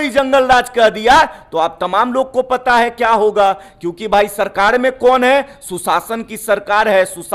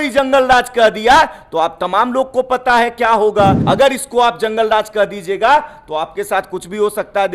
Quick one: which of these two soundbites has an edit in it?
second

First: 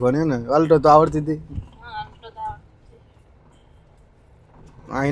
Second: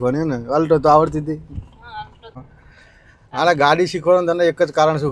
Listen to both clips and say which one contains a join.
second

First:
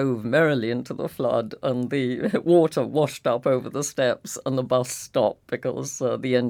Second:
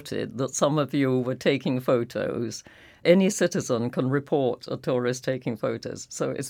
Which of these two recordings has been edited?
second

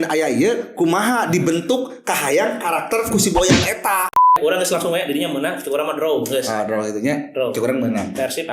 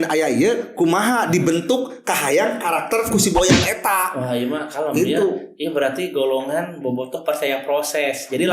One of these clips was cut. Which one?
first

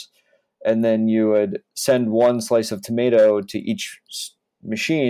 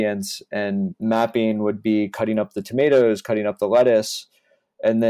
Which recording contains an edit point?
second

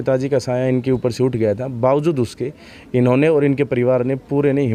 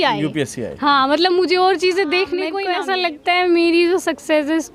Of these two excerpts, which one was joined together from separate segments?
second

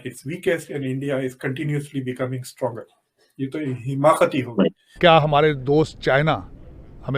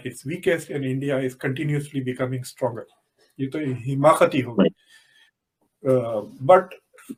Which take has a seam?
first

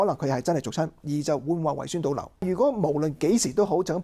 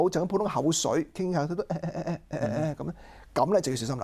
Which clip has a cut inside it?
first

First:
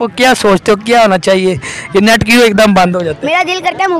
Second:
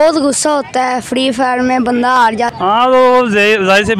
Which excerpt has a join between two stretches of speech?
second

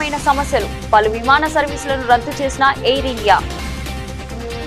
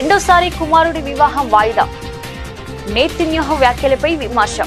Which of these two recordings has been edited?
first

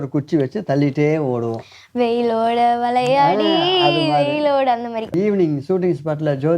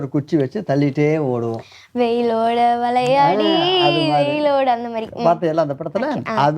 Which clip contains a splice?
first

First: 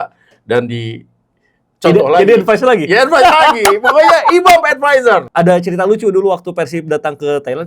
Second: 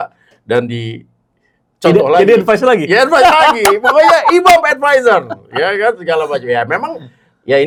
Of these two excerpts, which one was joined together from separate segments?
first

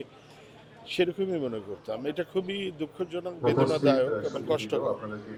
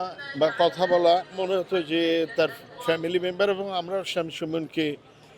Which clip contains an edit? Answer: second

